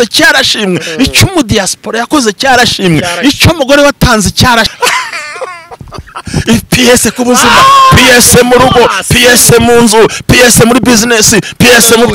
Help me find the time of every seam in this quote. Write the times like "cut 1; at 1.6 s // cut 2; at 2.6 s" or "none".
cut 1; at 4.7 s